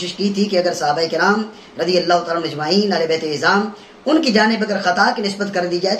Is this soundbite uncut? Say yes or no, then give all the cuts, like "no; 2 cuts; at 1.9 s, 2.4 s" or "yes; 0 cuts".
yes; 0 cuts